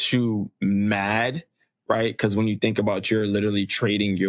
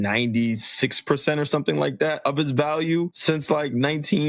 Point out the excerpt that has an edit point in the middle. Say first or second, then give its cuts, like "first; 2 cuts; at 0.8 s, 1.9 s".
second; 2 cuts; at 2.2 s, 3.2 s